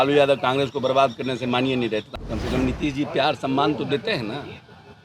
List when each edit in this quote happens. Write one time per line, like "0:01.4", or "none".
0:02.1